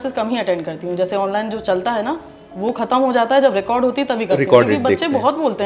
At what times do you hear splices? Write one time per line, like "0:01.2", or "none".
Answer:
none

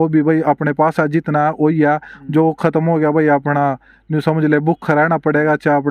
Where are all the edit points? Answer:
none

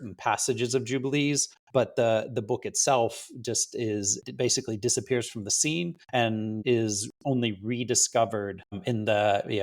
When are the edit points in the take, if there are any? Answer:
0:01.5
0:04.2
0:06.3
0:08.8

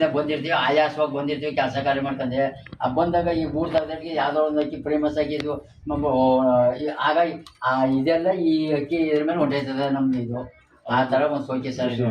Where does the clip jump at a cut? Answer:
none

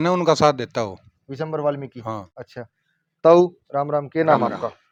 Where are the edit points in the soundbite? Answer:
none

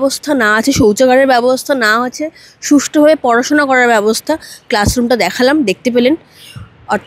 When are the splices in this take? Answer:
none

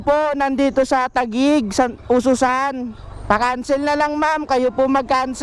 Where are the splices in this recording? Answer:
none

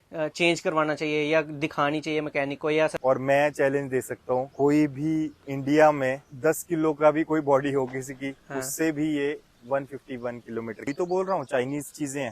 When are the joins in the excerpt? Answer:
0:03.0
0:04.5
0:05.4
0:06.3
0:10.9

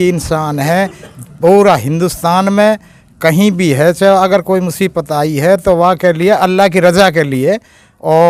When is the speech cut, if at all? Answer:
none

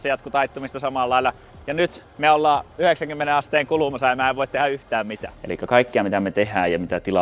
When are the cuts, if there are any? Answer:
0:05.3

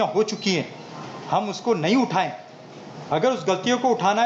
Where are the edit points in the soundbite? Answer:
none

